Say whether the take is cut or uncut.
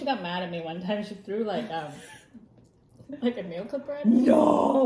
uncut